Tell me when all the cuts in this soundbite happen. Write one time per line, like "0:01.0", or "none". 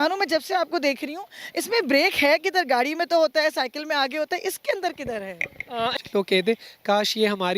0:05.9